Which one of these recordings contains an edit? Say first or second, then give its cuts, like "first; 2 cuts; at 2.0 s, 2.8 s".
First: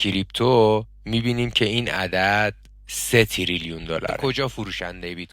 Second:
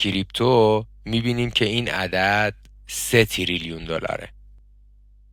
first; 1 cut; at 4.2 s